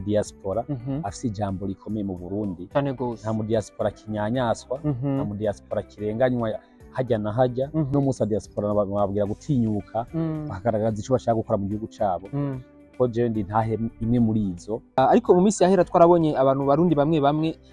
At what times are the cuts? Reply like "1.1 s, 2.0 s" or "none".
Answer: 7.9 s, 15.0 s